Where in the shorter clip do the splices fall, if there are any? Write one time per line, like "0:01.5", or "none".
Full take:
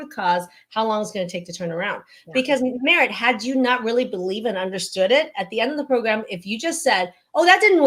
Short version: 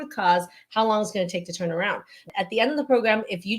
0:02.3